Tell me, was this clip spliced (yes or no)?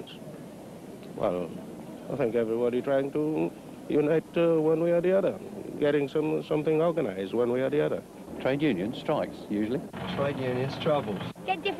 no